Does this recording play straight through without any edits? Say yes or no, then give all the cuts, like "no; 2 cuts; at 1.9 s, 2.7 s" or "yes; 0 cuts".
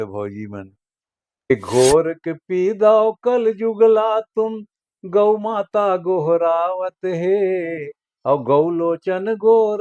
no; 1 cut; at 1.5 s